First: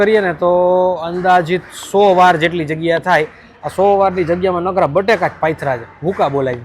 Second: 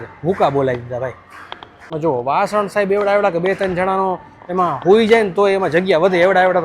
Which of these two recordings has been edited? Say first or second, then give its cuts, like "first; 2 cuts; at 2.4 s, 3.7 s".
second; 1 cut; at 1.9 s